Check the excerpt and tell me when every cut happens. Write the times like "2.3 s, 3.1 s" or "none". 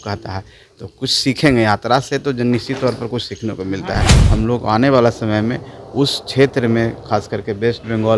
4.2 s